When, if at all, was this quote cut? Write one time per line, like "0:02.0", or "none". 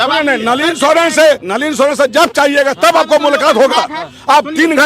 0:01.5